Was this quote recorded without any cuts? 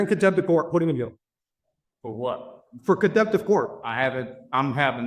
yes; 0 cuts

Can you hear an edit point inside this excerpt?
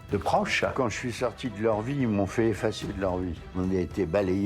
yes; 2 cuts; at 0.7 s, 3.4 s

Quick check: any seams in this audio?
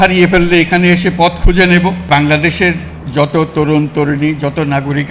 yes; 1 cut; at 2.1 s

